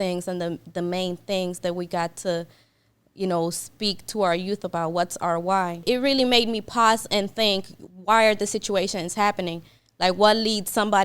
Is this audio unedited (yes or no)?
no